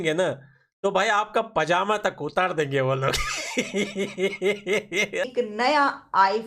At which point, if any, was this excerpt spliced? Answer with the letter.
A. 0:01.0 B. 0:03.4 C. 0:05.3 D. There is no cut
C